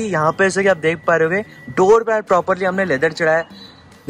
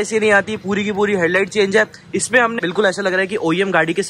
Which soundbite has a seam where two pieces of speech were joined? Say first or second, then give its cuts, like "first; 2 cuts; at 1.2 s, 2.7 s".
second; 1 cut; at 2.6 s